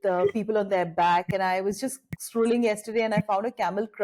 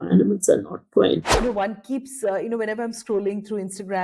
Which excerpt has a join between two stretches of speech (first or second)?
second